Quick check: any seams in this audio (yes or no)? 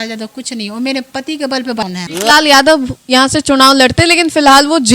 yes